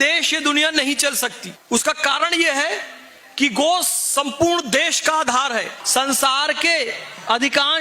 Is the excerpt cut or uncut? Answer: cut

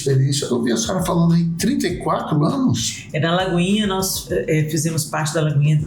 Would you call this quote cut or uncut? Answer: uncut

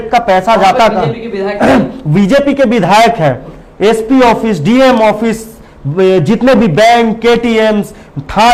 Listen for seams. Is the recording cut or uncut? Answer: uncut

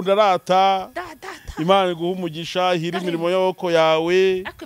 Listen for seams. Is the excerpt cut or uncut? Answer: uncut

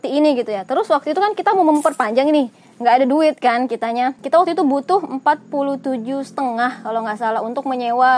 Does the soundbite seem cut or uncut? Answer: cut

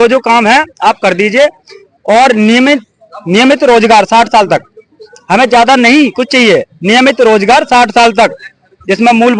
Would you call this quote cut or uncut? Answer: uncut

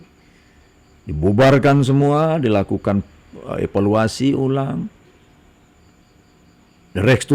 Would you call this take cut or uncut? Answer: uncut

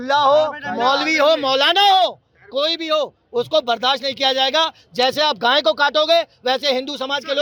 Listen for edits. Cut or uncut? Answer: uncut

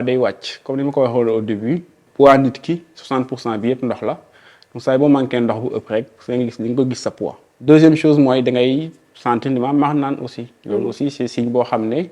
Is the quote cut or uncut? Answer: cut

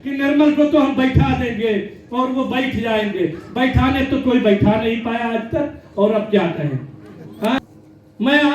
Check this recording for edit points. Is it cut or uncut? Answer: cut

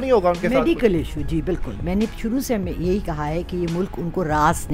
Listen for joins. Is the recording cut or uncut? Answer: uncut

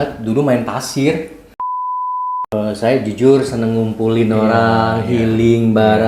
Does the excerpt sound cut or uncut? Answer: cut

